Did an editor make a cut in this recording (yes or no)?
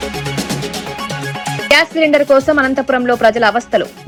no